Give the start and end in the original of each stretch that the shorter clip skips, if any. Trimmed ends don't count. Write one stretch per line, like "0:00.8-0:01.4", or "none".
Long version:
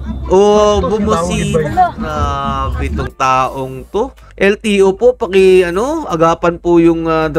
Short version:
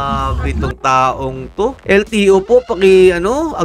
0:04.1-0:04.3